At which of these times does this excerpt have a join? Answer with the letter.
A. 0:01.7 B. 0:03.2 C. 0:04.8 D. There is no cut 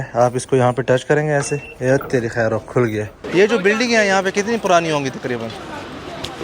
B